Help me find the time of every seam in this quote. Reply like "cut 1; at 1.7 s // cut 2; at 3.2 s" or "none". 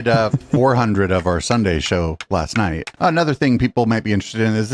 cut 1; at 2.9 s